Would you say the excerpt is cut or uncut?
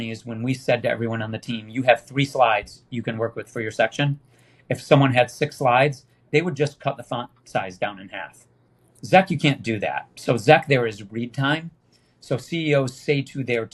uncut